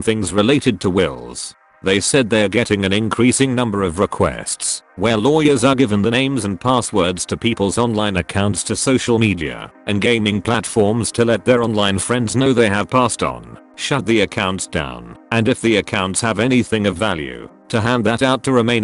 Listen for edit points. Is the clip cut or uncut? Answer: uncut